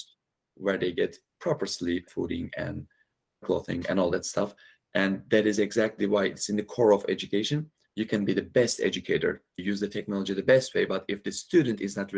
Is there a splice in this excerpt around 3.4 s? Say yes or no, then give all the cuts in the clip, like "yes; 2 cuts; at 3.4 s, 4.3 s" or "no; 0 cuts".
yes; 4 cuts; at 2.1 s, 3.4 s, 7.8 s, 9.6 s